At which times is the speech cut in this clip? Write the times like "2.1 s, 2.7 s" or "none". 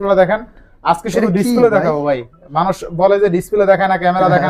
none